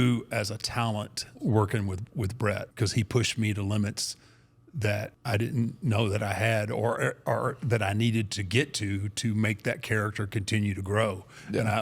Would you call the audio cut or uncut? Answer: cut